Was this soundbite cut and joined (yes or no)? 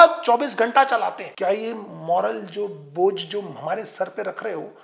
yes